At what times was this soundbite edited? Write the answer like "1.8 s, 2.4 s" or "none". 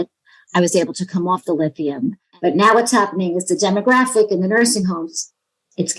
2.2 s